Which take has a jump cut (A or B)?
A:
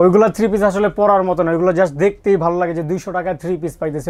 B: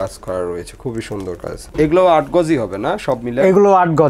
B